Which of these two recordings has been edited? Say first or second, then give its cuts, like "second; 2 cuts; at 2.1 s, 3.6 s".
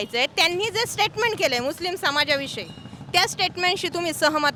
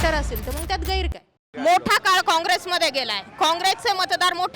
second; 1 cut; at 1.5 s